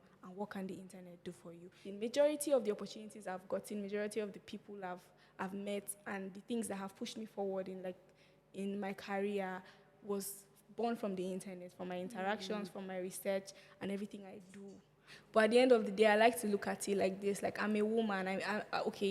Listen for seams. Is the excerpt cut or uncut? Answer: cut